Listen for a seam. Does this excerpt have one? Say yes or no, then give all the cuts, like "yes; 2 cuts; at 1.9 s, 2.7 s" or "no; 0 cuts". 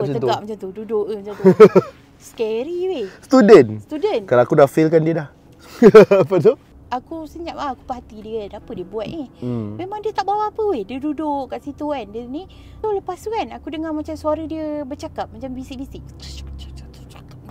no; 0 cuts